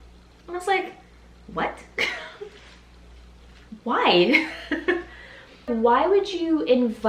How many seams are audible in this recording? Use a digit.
1